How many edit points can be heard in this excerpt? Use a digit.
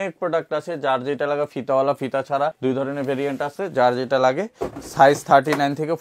0